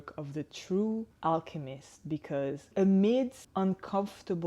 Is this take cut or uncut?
cut